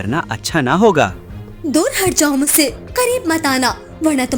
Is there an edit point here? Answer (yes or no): no